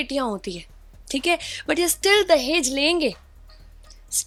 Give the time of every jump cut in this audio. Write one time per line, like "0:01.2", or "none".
none